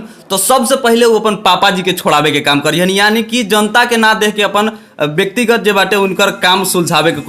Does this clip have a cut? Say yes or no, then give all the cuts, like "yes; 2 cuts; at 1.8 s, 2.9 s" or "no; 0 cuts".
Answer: no; 0 cuts